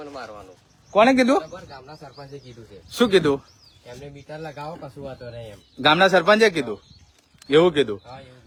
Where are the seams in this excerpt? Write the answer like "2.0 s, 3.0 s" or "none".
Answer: none

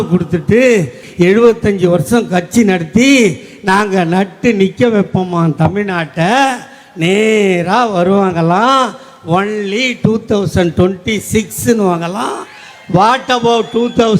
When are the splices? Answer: 1.0 s

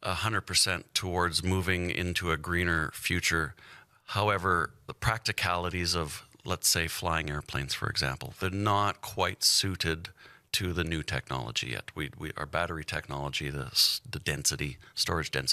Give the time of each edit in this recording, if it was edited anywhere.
none

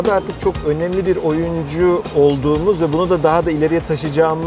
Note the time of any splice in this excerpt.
none

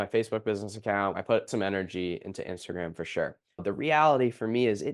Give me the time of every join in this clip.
1.1 s, 3.5 s

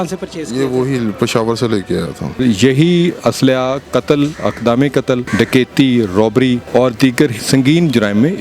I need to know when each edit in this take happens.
2.4 s, 5.3 s, 6.6 s, 7.4 s

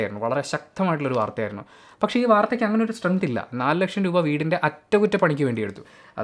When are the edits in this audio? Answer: none

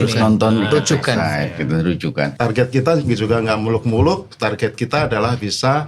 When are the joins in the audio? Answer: 2.3 s

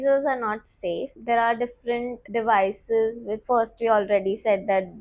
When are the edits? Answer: 1.1 s, 2.2 s, 3.3 s

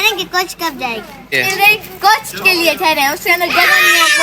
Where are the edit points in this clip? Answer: 1.3 s

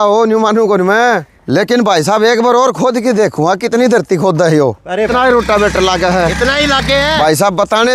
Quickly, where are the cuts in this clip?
1.3 s, 5.1 s, 7.1 s

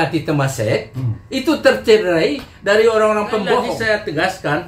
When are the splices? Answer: 3.7 s

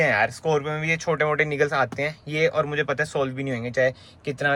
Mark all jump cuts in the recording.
none

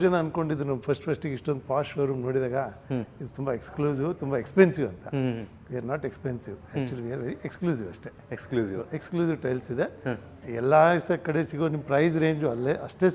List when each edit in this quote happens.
none

